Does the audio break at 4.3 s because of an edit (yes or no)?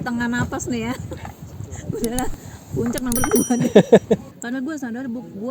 yes